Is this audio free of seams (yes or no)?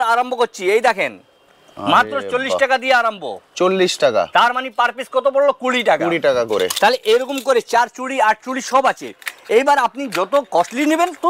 yes